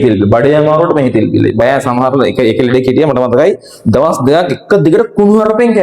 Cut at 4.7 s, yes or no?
no